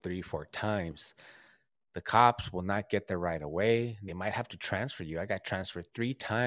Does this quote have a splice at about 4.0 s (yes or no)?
yes